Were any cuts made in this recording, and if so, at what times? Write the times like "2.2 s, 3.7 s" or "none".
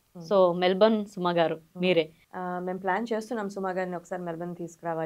2.2 s